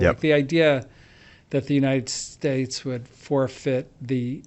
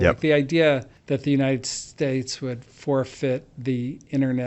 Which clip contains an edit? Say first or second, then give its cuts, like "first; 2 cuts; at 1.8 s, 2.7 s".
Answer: second; 1 cut; at 0.9 s